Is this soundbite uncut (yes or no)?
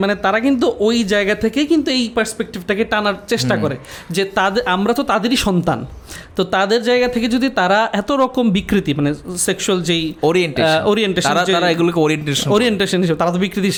yes